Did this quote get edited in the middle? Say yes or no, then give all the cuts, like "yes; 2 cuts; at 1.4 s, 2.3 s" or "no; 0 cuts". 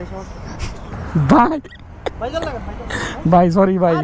yes; 1 cut; at 0.9 s